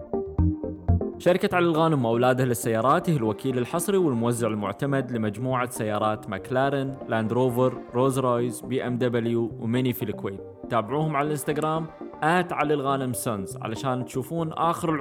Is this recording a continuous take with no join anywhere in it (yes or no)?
no